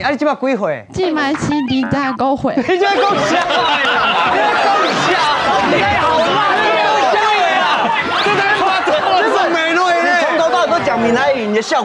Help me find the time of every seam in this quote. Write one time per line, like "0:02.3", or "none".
none